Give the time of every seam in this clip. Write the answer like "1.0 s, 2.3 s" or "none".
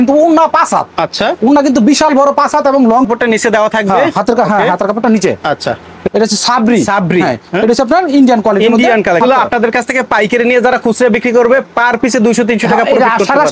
3.1 s, 6.0 s, 9.2 s